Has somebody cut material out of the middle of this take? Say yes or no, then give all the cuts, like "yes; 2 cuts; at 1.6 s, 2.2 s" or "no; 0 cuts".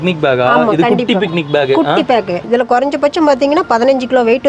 yes; 1 cut; at 2.4 s